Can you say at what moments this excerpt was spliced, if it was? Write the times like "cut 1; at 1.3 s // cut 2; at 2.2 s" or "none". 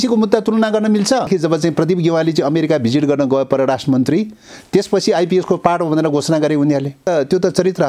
cut 1; at 1.3 s // cut 2; at 7.1 s